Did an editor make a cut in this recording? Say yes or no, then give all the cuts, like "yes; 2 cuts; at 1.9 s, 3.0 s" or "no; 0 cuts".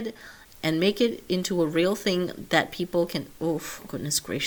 no; 0 cuts